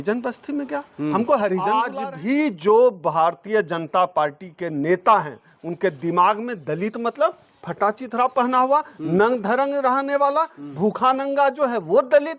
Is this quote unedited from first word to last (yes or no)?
no